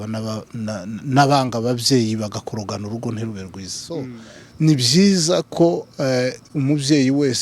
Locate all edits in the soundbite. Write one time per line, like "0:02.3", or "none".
0:04.2